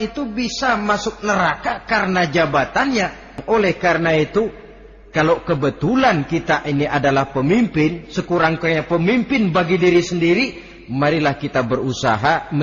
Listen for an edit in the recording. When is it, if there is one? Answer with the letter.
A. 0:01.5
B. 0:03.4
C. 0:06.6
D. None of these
B